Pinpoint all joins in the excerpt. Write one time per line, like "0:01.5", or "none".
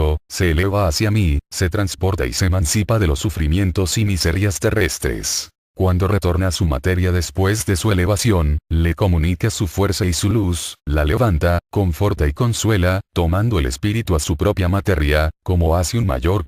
0:05.6